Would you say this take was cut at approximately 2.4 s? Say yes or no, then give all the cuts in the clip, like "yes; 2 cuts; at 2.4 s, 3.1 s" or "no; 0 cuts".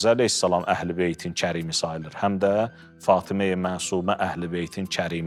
no; 0 cuts